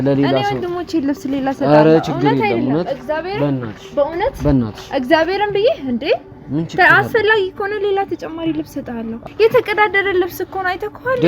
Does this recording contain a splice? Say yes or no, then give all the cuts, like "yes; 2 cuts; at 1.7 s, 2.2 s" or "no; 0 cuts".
yes; 1 cut; at 9.2 s